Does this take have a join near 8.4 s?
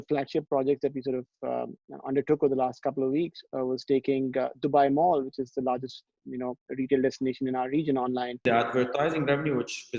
yes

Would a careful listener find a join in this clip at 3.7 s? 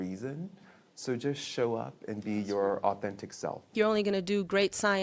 yes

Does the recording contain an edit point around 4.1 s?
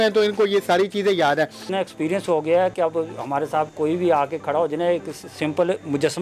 no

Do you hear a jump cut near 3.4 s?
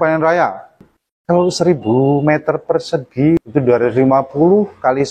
yes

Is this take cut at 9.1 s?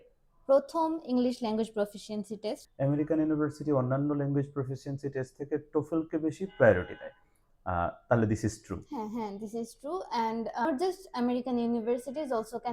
no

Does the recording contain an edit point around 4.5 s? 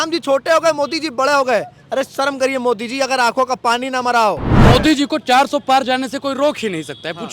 yes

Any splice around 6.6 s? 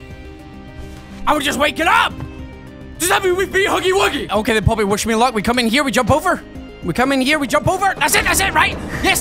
no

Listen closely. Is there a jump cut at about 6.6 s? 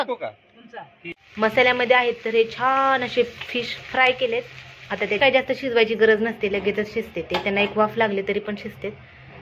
no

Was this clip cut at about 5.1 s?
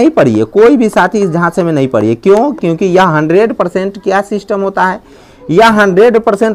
no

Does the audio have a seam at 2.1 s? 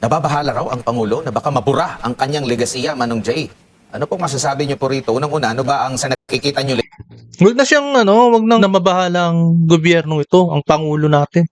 no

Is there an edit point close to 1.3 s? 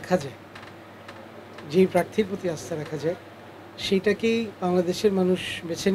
no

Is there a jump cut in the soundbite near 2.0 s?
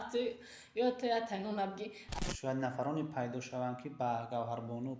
yes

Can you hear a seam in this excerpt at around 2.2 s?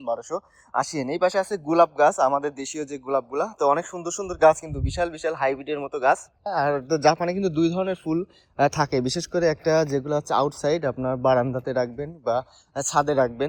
no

